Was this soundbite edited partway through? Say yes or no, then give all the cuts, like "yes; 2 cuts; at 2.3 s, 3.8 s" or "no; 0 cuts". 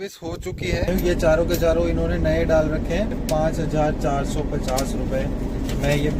yes; 2 cuts; at 0.9 s, 3.2 s